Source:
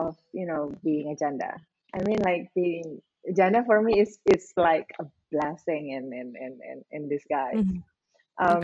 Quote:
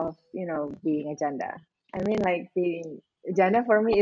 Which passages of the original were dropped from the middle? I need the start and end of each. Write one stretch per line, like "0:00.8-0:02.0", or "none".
none